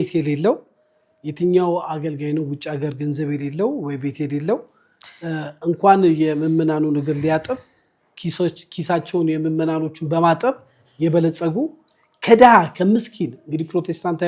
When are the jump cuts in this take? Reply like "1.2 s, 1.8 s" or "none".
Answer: none